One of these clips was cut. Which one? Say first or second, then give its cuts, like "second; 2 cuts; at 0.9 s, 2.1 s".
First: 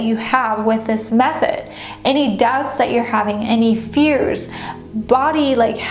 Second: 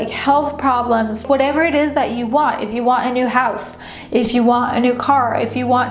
second; 1 cut; at 1.2 s